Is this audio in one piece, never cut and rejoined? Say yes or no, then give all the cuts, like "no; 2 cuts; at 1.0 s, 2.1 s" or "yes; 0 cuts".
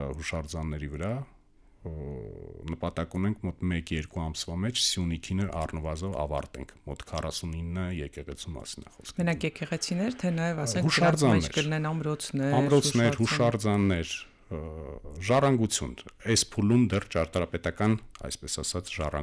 yes; 0 cuts